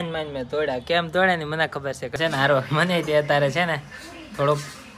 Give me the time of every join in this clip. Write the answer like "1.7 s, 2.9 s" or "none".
2.2 s